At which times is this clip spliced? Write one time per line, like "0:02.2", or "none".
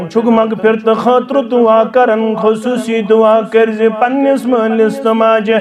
none